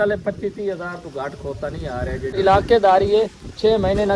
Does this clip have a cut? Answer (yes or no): yes